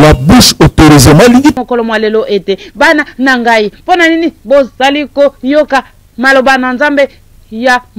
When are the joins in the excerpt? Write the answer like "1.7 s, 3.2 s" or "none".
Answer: 1.5 s